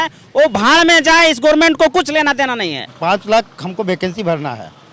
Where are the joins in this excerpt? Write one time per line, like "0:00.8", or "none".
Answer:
0:02.8